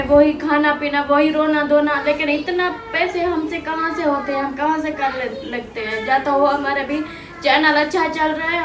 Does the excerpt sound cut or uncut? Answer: uncut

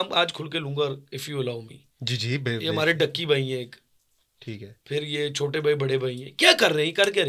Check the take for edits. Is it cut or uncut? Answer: uncut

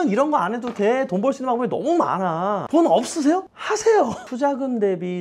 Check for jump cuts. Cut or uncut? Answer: uncut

